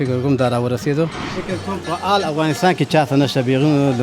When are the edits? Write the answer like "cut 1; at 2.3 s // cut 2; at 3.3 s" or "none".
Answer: cut 1; at 1.2 s